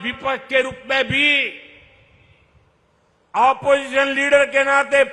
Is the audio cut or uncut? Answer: uncut